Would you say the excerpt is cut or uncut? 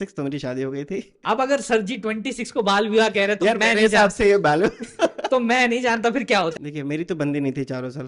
cut